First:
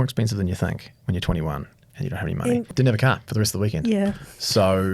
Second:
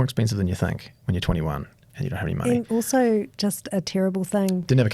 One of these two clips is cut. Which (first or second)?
first